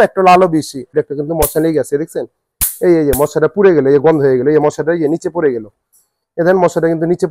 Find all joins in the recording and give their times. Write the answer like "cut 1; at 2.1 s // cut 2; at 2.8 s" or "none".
cut 1; at 1.0 s